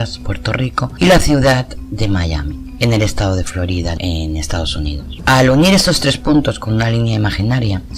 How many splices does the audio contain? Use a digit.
1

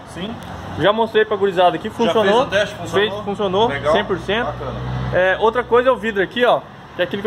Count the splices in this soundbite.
0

